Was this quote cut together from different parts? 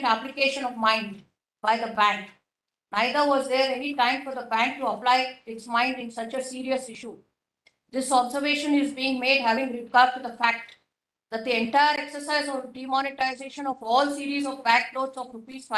no; 0 cuts

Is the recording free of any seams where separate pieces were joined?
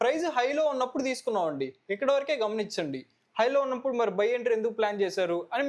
yes; 0 cuts

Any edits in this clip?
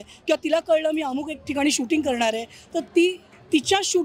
no; 0 cuts

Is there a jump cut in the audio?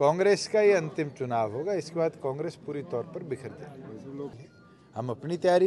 yes; 1 cut; at 4.3 s

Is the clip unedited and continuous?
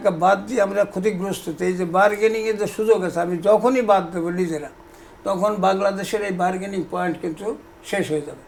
yes; 0 cuts

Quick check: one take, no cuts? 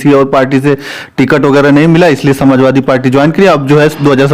yes; 0 cuts

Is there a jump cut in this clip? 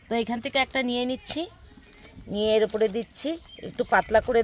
no; 0 cuts

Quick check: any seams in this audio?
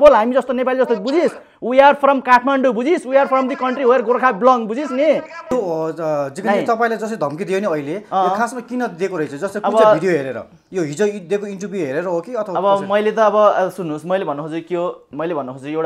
yes; 1 cut; at 5.4 s

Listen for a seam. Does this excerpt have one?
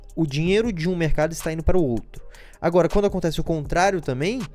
no; 0 cuts

